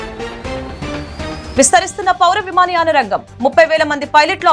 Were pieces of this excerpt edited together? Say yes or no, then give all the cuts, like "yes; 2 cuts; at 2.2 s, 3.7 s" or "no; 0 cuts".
yes; 1 cut; at 1.5 s